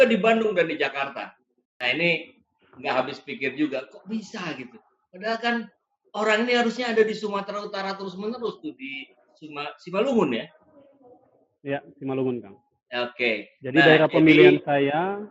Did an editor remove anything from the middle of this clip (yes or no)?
no